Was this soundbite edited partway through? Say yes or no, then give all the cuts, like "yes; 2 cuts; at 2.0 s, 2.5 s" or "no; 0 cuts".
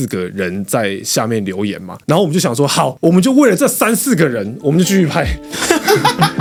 no; 0 cuts